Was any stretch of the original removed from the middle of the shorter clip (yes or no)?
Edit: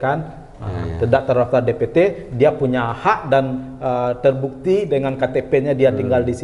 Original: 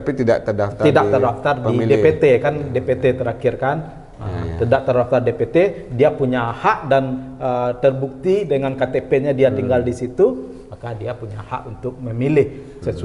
no